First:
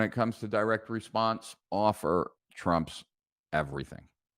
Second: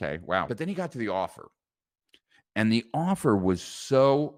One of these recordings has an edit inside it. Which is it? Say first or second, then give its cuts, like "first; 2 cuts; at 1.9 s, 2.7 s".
first; 1 cut; at 1.5 s